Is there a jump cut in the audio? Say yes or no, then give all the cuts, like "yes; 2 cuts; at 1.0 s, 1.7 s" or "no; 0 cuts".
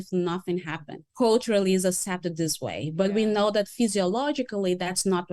yes; 1 cut; at 1.0 s